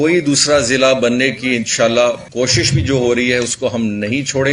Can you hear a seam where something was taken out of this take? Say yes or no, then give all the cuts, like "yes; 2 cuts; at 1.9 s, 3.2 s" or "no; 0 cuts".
yes; 1 cut; at 2.2 s